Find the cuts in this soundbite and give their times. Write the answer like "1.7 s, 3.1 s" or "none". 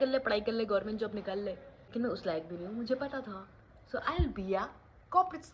1.7 s